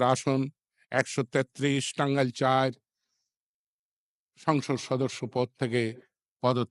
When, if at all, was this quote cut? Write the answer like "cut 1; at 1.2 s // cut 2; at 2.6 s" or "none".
none